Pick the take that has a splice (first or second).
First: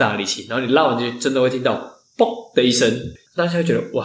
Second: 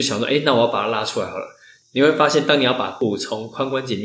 first